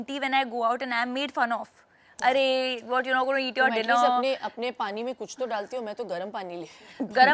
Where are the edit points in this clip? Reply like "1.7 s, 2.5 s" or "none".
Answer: none